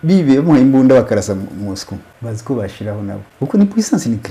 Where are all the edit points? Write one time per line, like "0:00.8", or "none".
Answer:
0:02.1
0:03.3